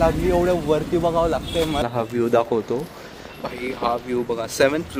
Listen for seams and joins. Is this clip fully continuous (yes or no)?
no